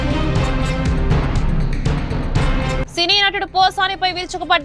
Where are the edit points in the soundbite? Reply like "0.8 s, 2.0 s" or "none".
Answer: 2.9 s